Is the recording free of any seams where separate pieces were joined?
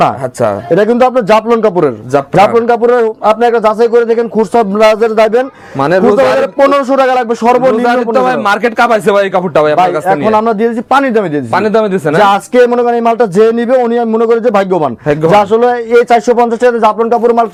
yes; 0 cuts

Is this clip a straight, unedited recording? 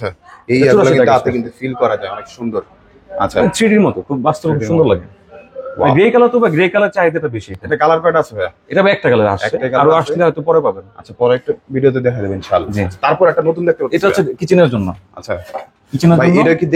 yes; 0 cuts

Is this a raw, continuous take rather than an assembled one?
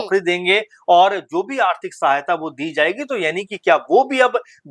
yes; 0 cuts

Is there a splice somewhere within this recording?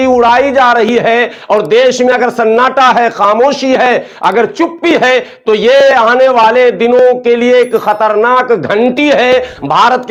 no; 0 cuts

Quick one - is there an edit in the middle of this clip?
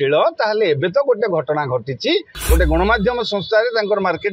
yes; 1 cut; at 2.3 s

